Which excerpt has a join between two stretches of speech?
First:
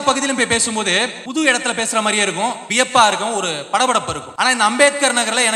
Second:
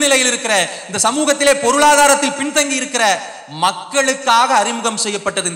first; 3 cuts; at 1.2 s, 2.6 s, 4.2 s

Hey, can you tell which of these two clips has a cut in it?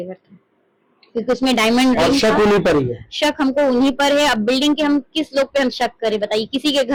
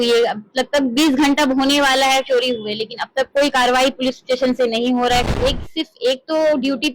second; 1 cut; at 5.3 s

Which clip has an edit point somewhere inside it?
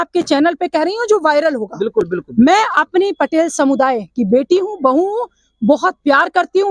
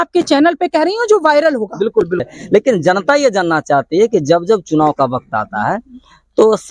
second; 1 cut; at 2.3 s

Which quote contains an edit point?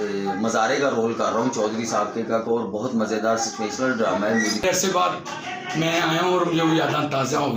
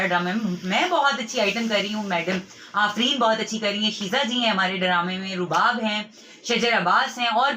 first; 1 cut; at 4.6 s

